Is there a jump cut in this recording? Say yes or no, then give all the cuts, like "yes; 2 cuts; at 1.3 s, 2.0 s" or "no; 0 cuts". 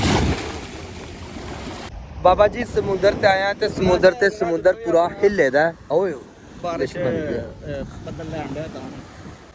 no; 0 cuts